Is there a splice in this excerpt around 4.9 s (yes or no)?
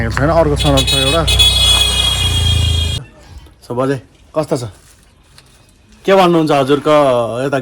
no